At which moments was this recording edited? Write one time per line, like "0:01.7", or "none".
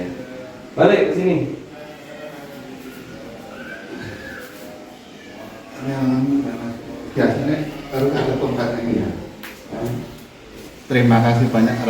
0:10.7